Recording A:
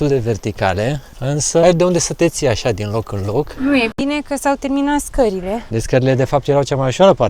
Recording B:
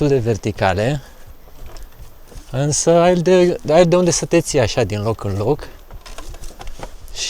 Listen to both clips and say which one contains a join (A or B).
A